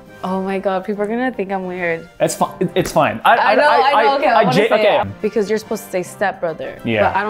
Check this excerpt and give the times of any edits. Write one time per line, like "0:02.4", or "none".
0:05.0